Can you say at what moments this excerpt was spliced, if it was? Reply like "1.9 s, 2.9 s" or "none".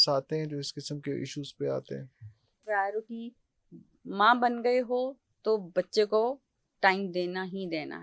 2.6 s